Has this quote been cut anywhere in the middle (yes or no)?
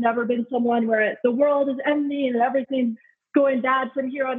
yes